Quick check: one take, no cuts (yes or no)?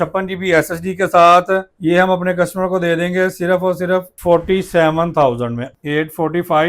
no